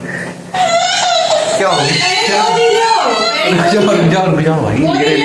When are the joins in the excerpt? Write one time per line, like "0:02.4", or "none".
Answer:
none